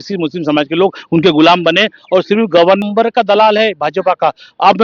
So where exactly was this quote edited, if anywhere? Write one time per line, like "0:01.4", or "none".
0:02.8